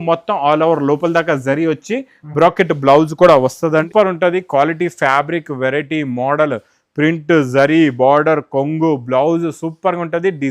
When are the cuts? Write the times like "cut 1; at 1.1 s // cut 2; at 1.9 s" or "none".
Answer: cut 1; at 3.9 s